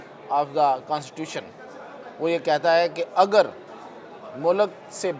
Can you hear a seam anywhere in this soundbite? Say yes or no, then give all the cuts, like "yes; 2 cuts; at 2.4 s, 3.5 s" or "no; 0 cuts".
no; 0 cuts